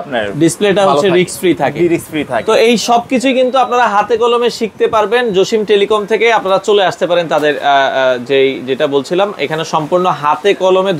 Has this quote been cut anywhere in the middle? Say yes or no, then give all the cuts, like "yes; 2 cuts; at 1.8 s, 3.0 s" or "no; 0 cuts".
no; 0 cuts